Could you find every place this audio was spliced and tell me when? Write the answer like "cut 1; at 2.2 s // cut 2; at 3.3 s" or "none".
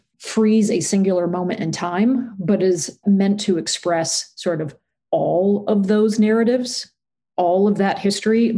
cut 1; at 2.8 s